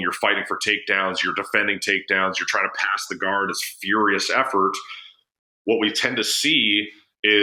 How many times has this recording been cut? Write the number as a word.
zero